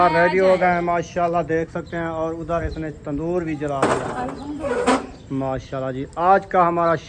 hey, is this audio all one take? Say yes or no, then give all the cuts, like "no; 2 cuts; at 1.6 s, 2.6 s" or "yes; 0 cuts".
yes; 0 cuts